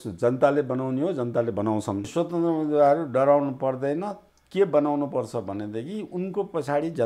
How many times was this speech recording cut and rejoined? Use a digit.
1